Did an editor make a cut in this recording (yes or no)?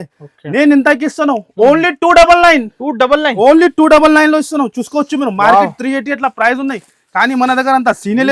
no